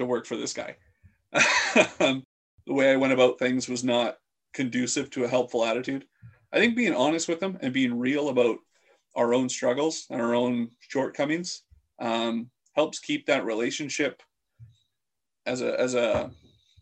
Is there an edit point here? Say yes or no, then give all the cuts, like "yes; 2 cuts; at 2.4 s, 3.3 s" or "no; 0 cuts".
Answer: yes; 1 cut; at 2.3 s